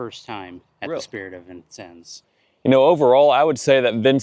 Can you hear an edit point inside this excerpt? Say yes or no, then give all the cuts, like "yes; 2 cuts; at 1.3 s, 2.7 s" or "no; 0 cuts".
yes; 1 cut; at 2.1 s